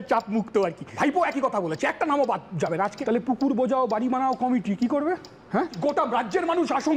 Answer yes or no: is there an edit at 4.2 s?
no